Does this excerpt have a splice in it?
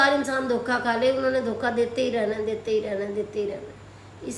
no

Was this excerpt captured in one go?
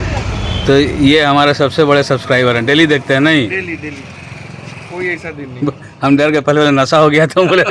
yes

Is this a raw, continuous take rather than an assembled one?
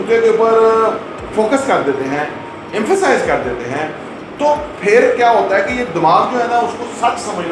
yes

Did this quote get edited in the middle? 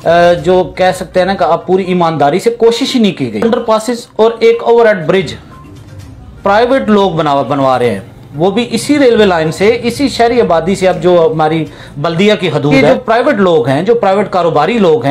yes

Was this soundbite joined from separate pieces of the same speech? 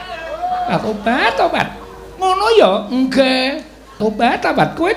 yes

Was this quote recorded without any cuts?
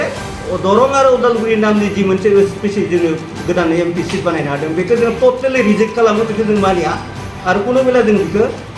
yes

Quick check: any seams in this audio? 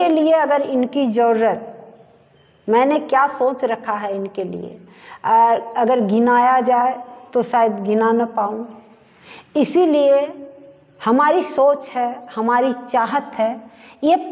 no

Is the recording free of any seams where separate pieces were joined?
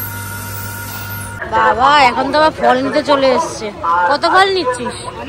no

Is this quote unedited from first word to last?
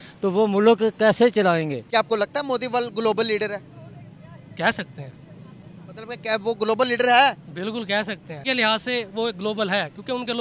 no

